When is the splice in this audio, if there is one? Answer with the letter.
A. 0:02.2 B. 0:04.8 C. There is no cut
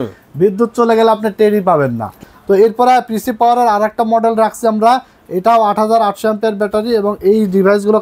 A